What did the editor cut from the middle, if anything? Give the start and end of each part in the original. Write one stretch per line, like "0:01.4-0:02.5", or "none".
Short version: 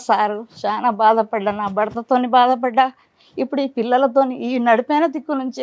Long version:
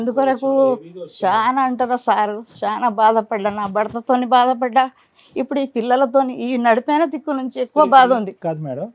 none